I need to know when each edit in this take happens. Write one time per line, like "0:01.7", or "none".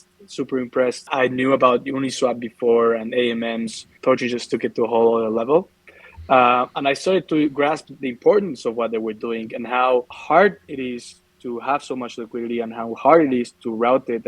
0:01.1
0:03.8
0:10.1

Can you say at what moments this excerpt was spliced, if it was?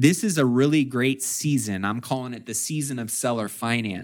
none

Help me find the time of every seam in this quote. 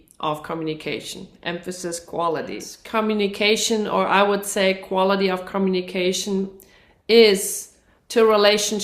0:02.7

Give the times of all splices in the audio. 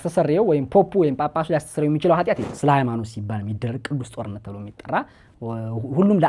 0:02.5

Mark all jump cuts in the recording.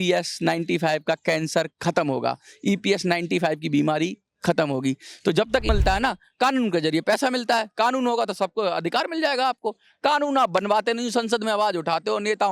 0:05.7

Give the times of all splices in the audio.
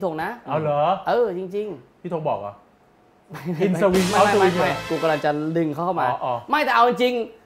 none

